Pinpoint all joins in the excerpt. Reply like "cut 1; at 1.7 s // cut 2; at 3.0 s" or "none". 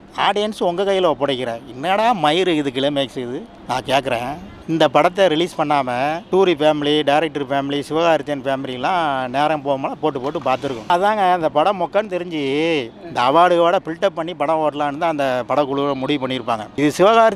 cut 1; at 4.5 s // cut 2; at 10.9 s